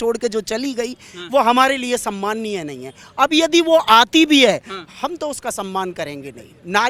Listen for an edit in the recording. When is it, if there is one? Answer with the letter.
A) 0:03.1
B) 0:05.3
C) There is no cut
C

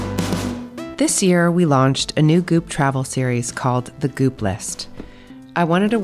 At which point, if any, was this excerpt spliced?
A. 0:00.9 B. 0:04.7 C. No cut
A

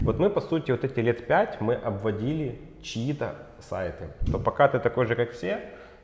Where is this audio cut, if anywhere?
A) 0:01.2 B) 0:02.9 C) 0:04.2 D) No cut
C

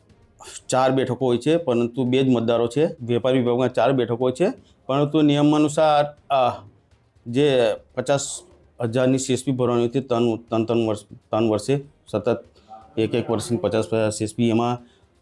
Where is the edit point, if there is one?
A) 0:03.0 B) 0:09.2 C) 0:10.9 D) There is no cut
A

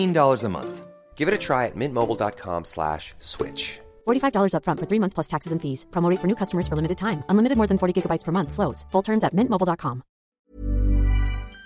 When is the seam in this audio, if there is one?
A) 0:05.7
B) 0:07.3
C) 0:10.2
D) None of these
C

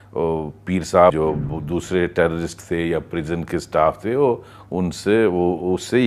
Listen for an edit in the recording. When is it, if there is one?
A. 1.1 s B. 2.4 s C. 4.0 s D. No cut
A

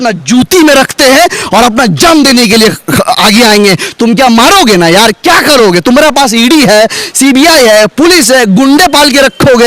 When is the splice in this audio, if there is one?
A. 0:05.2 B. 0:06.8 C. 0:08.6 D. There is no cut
D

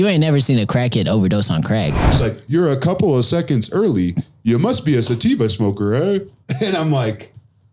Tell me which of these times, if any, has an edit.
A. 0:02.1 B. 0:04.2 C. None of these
A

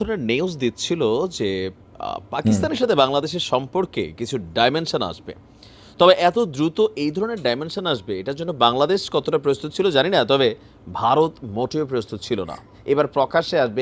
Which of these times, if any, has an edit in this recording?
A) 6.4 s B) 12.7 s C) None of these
B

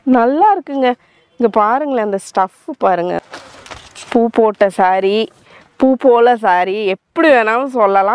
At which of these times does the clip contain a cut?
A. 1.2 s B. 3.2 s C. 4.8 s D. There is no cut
B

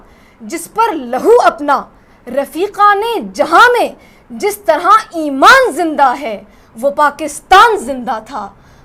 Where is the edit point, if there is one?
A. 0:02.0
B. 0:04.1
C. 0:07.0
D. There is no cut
D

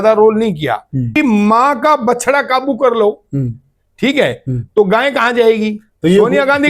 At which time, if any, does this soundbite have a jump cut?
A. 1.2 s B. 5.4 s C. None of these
A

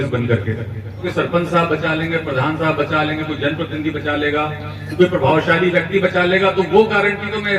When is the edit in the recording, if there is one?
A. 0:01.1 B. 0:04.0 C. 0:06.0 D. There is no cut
A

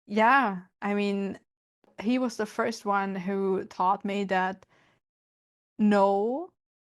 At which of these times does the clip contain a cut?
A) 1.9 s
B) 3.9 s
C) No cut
A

